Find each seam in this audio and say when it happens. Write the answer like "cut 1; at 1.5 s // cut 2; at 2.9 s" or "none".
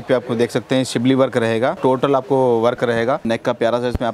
cut 1; at 1.8 s // cut 2; at 3.2 s